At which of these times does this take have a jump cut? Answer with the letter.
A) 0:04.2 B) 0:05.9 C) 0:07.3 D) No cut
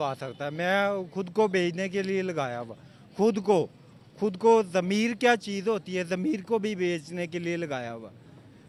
D